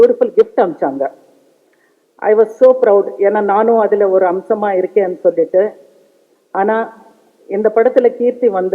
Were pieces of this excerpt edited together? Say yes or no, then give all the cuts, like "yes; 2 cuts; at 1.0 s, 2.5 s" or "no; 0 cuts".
no; 0 cuts